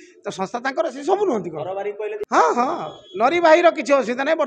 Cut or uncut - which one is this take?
cut